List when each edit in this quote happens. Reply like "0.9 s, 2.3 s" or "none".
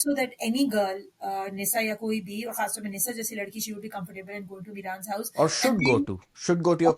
none